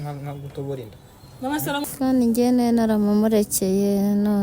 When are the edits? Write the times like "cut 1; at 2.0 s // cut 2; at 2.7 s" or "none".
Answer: cut 1; at 1.8 s

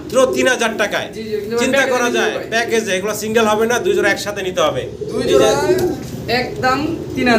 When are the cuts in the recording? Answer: none

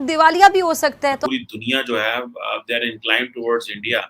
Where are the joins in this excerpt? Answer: cut 1; at 1.2 s

